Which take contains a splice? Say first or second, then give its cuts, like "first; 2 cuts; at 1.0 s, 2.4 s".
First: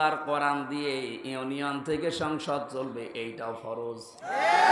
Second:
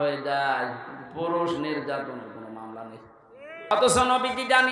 second; 1 cut; at 3.7 s